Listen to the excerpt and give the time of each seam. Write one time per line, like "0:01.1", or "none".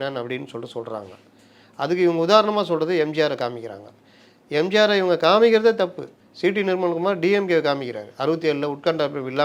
none